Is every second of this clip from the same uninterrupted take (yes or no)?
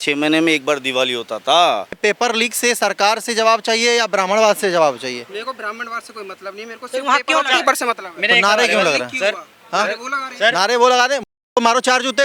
no